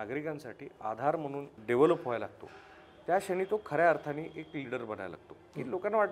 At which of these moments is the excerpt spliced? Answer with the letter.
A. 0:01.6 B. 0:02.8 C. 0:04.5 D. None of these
A